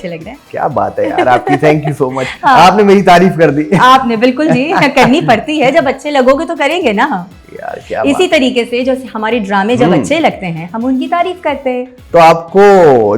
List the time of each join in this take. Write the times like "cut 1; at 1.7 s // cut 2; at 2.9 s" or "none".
none